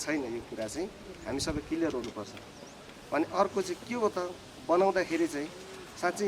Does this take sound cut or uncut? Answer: uncut